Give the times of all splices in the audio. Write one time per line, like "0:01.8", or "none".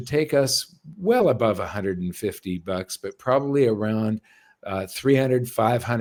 none